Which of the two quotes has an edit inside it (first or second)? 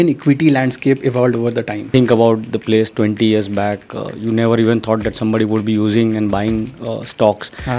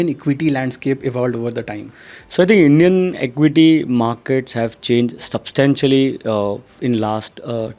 first